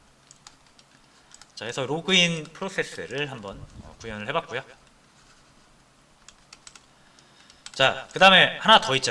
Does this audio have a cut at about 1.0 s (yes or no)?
no